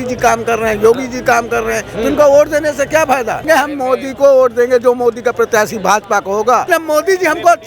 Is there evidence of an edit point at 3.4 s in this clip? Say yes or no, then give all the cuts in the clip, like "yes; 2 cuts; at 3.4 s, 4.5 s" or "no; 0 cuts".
yes; 2 cuts; at 3.4 s, 6.7 s